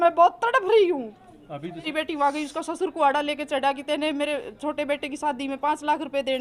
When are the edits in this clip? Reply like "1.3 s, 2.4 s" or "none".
1.9 s